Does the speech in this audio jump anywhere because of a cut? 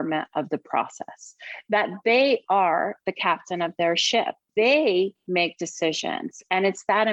yes; 1 cut; at 4.4 s

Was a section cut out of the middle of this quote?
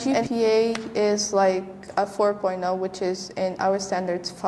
no; 0 cuts

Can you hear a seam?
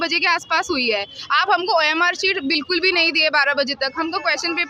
no; 0 cuts

